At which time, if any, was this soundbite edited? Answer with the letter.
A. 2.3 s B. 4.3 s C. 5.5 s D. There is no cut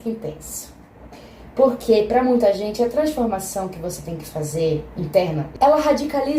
C